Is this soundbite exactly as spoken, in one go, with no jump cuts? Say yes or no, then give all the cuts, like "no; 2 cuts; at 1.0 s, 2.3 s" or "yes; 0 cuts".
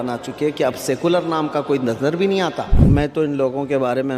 no; 1 cut; at 2.8 s